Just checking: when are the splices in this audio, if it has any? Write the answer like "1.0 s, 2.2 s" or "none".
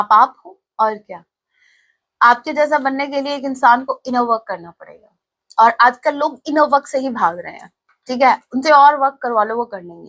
none